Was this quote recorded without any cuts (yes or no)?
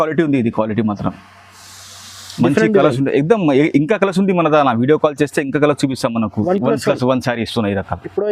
no